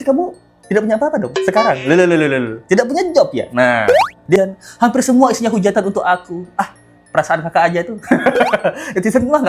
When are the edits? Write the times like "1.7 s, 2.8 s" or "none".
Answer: 4.4 s